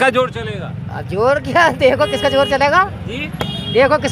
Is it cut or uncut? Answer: uncut